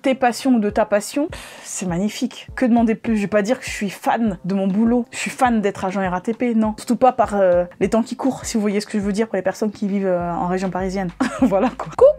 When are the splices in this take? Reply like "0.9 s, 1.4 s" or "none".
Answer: none